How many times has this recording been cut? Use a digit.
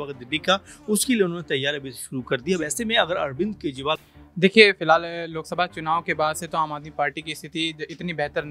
1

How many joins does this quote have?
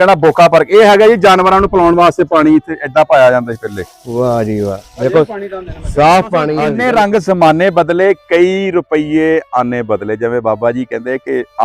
1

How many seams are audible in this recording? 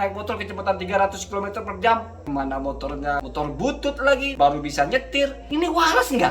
4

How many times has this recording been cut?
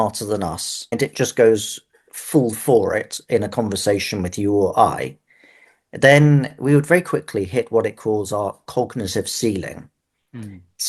1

